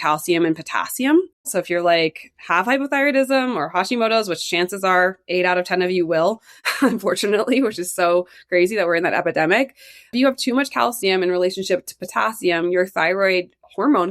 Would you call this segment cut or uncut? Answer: cut